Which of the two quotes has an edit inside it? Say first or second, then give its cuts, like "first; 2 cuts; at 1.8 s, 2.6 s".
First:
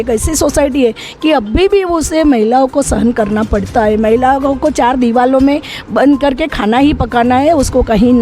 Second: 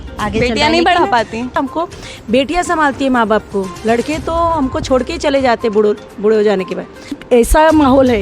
second; 2 cuts; at 1.6 s, 7.1 s